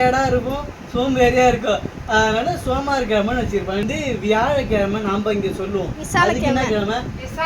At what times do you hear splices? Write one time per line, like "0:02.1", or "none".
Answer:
0:03.9

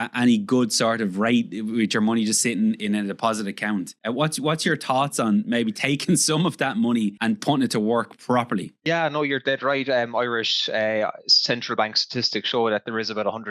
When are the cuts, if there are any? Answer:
0:03.9
0:07.2
0:08.8

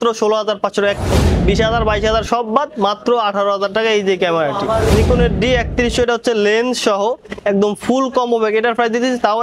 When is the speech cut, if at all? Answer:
0:01.1
0:04.9

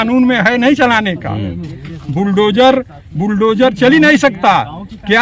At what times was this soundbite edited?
none

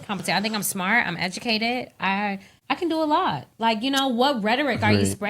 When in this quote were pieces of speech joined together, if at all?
0:02.5

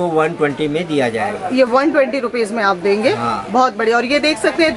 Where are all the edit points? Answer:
none

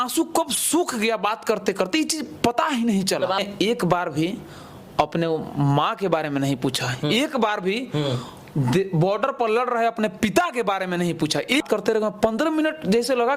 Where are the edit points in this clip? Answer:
0:03.4
0:11.6

